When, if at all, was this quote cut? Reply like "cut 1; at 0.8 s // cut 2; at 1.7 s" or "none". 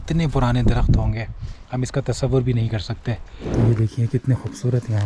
cut 1; at 3.3 s

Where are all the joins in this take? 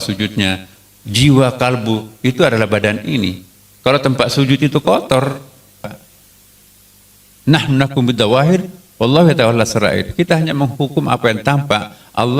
cut 1; at 5.8 s

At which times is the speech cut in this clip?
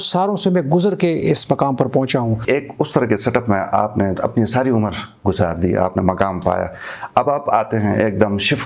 cut 1; at 2.4 s

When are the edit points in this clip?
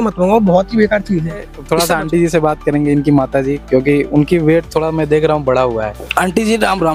none

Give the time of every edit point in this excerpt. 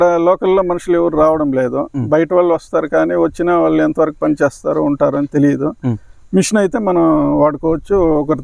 none

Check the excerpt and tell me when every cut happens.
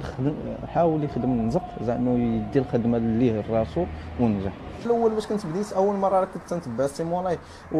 cut 1; at 4.8 s

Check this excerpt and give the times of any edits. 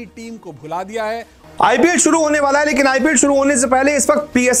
cut 1; at 1.4 s

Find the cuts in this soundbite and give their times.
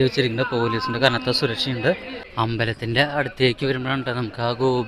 cut 1; at 2.2 s

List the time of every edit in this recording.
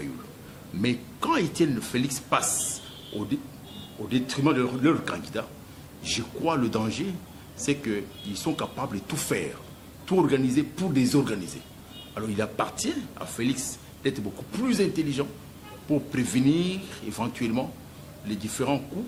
none

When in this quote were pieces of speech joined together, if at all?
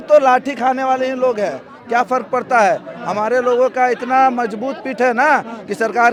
none

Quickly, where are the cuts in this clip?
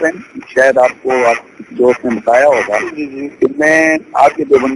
cut 1; at 3.2 s

